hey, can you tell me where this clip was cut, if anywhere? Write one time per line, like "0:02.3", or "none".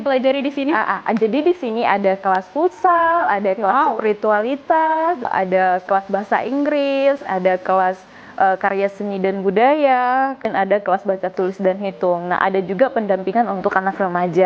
0:05.3
0:07.2
0:10.4